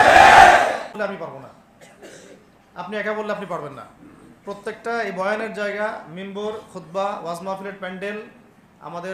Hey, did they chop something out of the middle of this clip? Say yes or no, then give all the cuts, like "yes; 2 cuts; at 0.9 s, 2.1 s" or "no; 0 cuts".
no; 0 cuts